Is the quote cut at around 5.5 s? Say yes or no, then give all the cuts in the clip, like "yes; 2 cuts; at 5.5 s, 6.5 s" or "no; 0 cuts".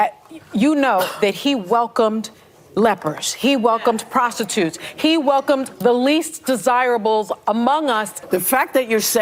no; 1 cut; at 8.1 s